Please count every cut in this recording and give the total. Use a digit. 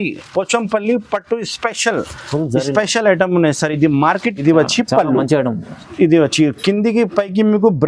1